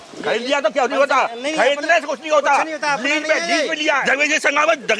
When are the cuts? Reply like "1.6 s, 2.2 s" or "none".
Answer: 4.0 s